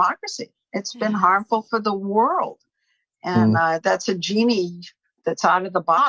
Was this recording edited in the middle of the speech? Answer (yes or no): no